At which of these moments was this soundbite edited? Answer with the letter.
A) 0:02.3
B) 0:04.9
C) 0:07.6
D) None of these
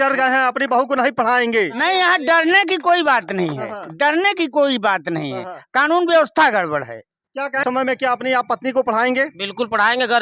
C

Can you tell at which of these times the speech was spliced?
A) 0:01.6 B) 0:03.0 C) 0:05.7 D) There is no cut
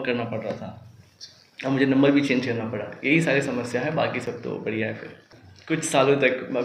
D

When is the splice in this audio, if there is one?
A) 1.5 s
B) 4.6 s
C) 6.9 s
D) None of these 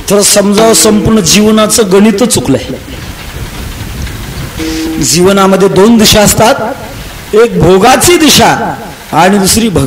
B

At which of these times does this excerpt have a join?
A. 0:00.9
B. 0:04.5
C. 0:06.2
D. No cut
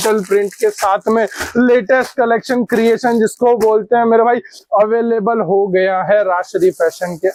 D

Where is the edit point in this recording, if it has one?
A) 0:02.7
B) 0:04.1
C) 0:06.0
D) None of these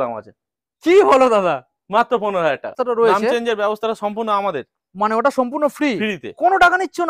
A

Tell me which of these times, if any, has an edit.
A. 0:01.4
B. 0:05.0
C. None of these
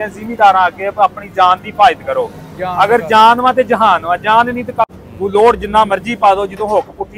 B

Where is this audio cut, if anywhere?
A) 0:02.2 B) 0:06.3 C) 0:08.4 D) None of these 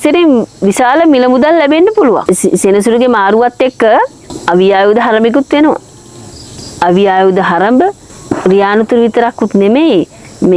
A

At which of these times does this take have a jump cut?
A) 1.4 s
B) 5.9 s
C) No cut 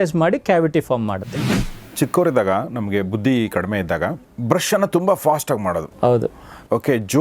A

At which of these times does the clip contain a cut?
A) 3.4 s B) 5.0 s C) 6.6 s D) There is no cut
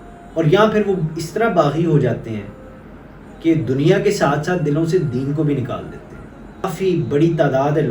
C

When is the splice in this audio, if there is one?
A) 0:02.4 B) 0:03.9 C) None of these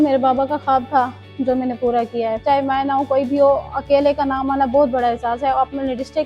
A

